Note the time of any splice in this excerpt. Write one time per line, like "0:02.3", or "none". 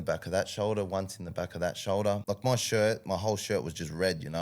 0:02.2